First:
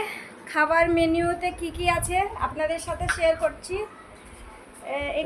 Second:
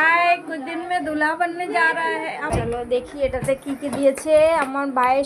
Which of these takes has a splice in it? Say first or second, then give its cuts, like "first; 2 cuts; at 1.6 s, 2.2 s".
second; 1 cut; at 2.5 s